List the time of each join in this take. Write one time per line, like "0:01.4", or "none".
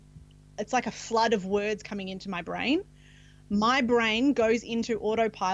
none